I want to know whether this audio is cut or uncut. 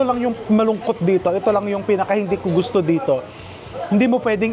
uncut